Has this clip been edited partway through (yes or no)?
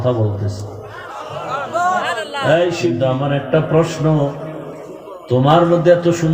yes